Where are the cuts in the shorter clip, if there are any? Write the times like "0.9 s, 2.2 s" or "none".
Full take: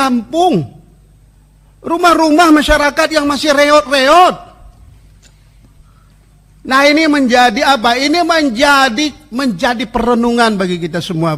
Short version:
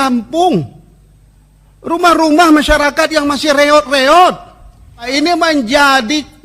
5.1 s

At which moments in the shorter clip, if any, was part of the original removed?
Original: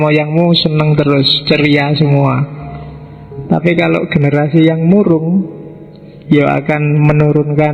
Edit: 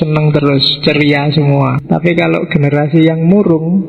1.8 s

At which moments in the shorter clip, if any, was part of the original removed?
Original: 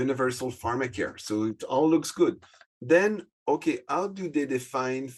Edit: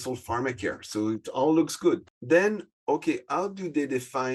2.1 s

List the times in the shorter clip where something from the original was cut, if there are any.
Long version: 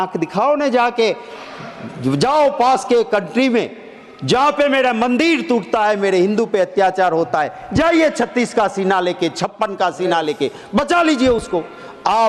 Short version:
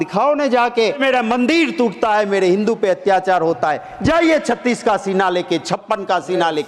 1.0 s

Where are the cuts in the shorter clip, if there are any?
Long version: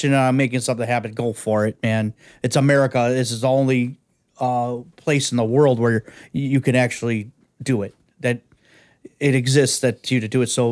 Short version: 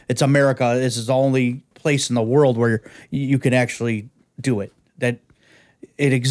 1.7 s

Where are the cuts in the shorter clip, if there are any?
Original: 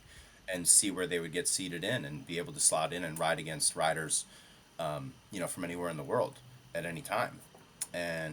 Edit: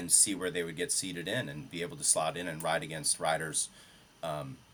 none

